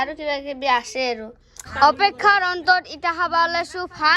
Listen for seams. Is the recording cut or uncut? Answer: cut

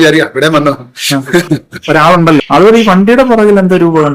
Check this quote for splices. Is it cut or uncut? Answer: cut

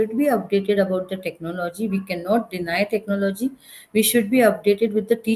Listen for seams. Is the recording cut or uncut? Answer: uncut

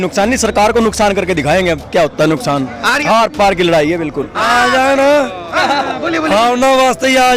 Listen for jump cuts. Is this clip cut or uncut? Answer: cut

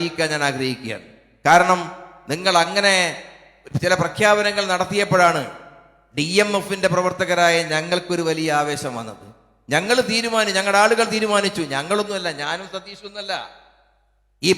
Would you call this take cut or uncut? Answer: uncut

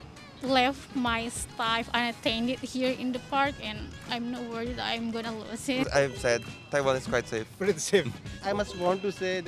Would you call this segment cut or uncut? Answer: cut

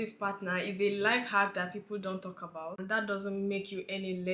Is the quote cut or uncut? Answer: cut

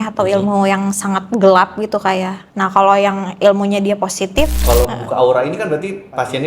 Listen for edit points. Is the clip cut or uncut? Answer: cut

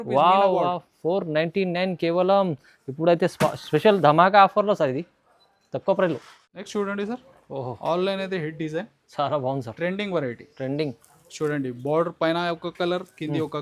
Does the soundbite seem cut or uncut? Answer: uncut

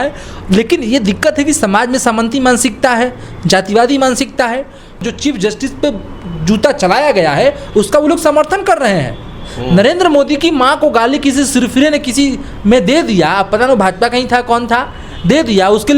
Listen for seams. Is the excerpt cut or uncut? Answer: cut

